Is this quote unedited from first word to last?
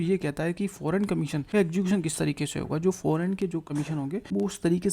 no; 2 cuts; at 1.4 s, 3.8 s

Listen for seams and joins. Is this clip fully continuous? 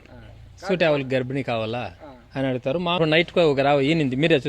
no; 1 cut; at 3.0 s

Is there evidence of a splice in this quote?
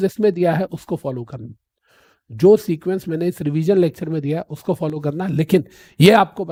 no; 0 cuts

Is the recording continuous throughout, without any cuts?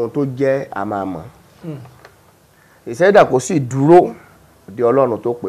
yes; 0 cuts

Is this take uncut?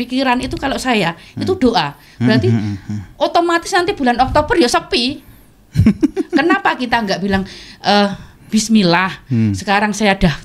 yes; 0 cuts

